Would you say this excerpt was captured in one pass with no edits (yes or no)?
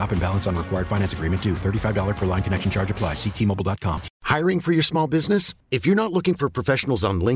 no